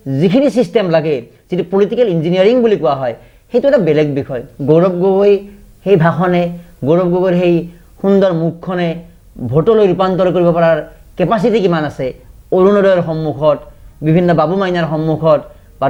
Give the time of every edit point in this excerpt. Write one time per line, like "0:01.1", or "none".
none

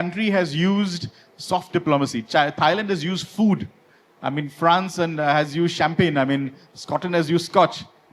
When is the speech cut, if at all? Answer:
none

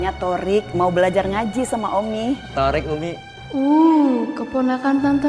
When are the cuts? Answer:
0:02.5
0:03.3

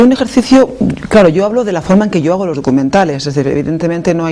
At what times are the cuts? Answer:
none

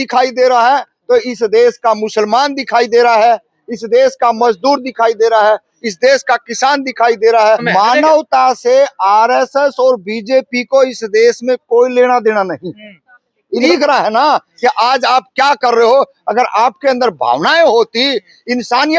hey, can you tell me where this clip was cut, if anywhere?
0:07.6
0:13.7

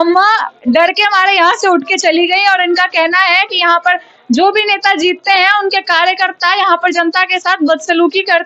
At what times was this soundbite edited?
none

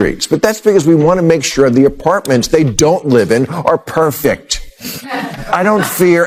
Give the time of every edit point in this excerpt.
none

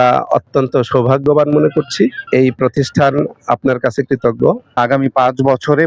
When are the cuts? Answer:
0:02.2
0:04.8

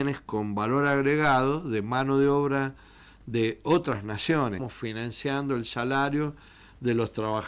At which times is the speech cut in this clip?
0:04.7

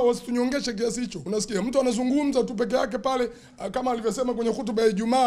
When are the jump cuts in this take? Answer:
0:01.2

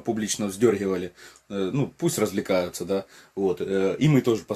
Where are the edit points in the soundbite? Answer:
none

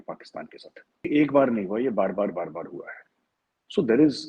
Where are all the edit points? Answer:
0:01.1

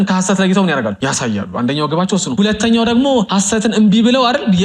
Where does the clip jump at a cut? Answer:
0:01.0
0:02.3
0:03.3

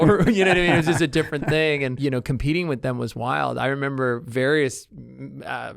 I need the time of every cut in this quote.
0:01.9

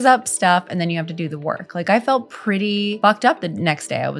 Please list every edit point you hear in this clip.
0:02.9

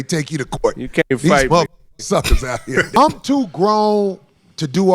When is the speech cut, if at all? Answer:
0:02.9

